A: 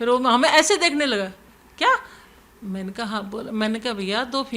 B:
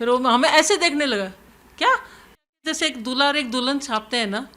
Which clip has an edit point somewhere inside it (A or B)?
B